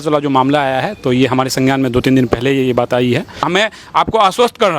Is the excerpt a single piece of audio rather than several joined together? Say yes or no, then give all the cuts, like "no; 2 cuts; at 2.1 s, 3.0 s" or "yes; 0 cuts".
no; 1 cut; at 3.5 s